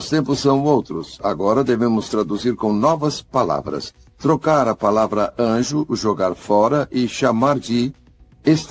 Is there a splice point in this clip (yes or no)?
no